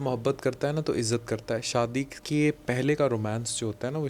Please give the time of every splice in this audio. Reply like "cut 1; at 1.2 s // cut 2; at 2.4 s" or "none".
cut 1; at 2.2 s